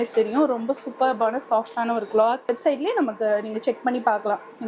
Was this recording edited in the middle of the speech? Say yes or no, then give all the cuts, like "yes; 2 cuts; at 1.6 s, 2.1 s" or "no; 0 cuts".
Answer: yes; 1 cut; at 2.5 s